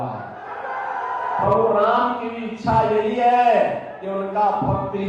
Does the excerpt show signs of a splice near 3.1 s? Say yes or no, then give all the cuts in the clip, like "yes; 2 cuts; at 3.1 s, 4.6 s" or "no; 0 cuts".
no; 1 cut; at 1.4 s